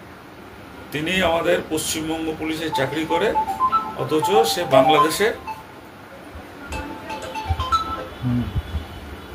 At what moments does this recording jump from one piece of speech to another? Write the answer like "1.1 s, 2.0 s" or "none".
none